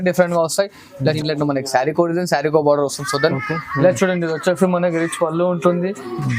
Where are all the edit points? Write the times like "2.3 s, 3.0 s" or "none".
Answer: 1.1 s